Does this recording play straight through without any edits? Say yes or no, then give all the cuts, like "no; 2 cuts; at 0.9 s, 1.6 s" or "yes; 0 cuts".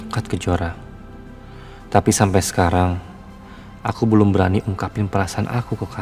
yes; 0 cuts